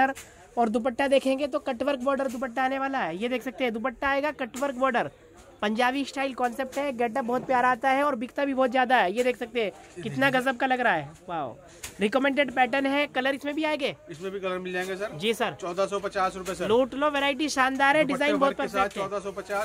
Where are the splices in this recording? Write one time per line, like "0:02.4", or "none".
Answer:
none